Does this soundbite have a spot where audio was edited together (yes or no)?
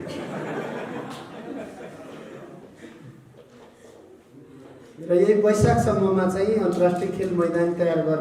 no